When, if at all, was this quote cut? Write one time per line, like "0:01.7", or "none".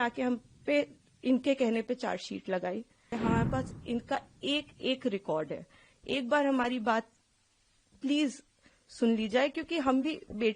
0:03.1